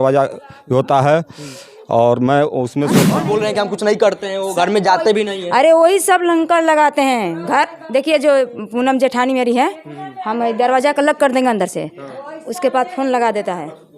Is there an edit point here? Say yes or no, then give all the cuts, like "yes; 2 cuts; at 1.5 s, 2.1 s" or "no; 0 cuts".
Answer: yes; 1 cut; at 3.1 s